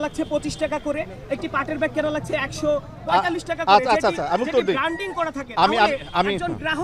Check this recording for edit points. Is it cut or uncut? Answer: uncut